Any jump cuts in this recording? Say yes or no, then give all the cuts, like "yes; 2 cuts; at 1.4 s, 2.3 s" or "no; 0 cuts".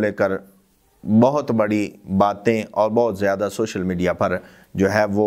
no; 0 cuts